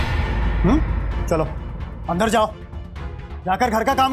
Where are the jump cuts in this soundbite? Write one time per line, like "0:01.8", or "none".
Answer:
none

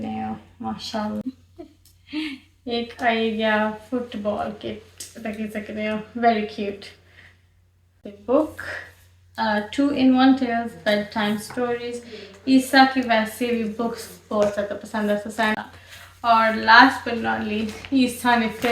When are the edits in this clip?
0:01.2
0:08.1
0:15.7

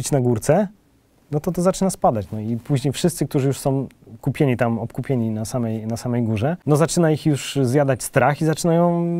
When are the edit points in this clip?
0:06.6

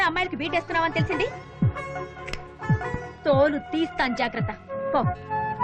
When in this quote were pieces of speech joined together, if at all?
none

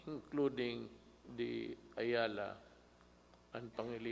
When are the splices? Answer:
none

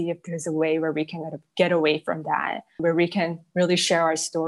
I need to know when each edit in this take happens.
0:02.8

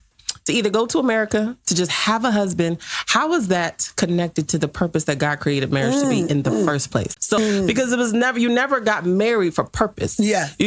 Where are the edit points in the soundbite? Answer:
0:07.4

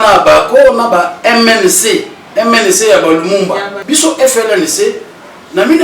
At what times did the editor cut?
0:03.7

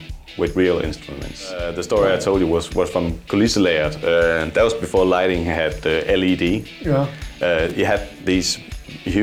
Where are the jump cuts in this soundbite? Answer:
0:01.7

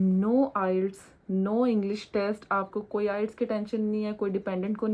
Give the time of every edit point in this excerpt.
none

